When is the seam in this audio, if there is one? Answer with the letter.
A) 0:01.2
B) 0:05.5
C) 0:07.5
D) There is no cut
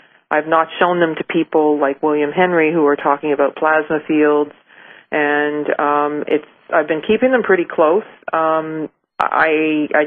B